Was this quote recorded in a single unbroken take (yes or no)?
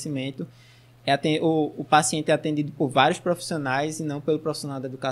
yes